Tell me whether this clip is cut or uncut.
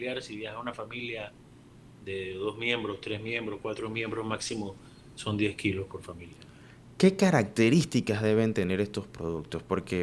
uncut